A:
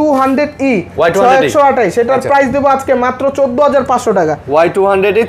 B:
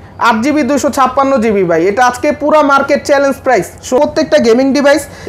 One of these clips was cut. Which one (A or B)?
B